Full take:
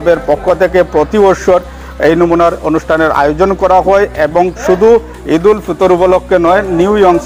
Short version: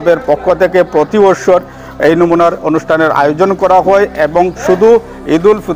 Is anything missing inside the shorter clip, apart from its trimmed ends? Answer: no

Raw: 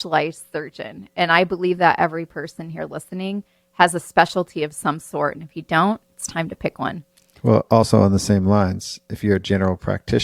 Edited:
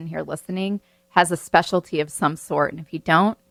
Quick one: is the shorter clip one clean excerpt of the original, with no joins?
yes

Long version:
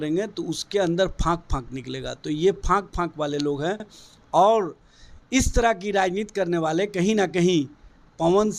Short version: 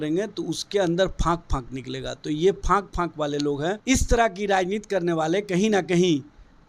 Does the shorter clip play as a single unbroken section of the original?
no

